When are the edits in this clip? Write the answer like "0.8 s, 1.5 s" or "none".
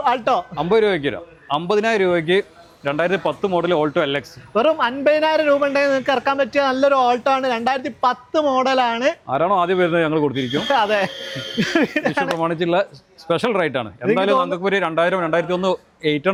none

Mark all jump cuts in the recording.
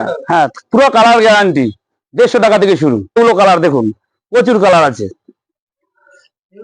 3.2 s

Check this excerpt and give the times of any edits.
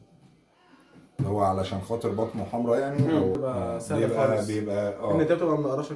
3.4 s

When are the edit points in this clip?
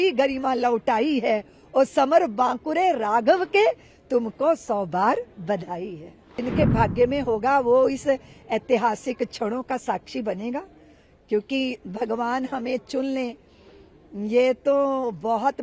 6.4 s

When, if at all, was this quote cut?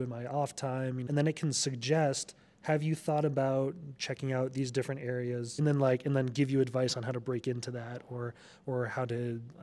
1.0 s, 5.6 s

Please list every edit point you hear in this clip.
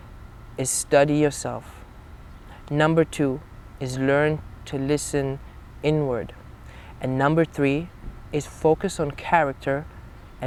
none

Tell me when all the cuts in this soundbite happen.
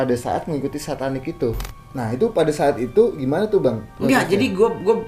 1.7 s

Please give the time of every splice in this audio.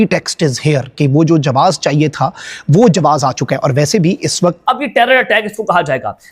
4.6 s

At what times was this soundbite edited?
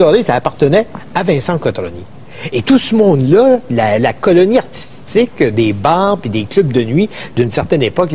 6.5 s

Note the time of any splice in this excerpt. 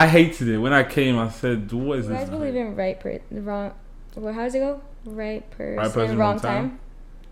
2.2 s

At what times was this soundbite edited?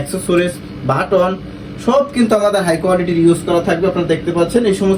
none

